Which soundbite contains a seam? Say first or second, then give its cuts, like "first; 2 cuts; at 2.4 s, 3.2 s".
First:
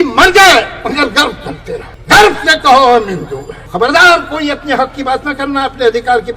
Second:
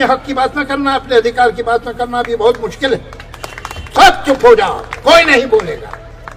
first; 2 cuts; at 1.9 s, 3.6 s